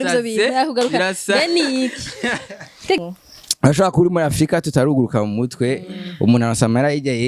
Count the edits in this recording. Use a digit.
1